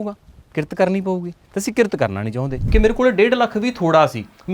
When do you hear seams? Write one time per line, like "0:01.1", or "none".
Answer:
0:02.6